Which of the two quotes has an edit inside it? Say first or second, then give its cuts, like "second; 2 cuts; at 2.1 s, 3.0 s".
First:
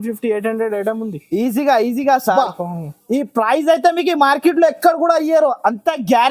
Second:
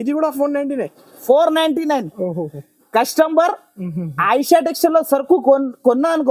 first; 1 cut; at 2.3 s